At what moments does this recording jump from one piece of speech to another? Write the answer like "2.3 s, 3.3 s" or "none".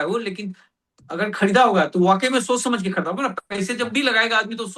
none